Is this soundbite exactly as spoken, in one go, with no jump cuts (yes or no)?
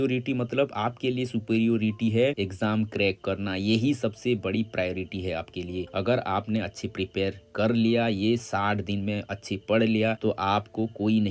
yes